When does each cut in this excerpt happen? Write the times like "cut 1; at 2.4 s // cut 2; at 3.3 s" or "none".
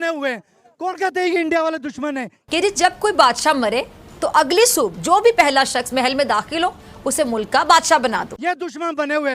cut 1; at 2.3 s // cut 2; at 8.3 s